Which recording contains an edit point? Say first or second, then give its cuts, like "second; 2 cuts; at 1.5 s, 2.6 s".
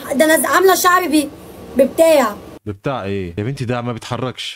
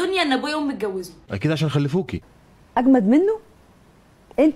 second; 1 cut; at 2.3 s